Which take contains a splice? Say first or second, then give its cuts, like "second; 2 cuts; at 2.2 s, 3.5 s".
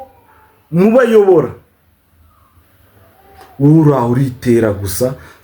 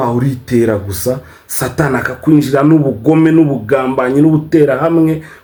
first; 1 cut; at 2.7 s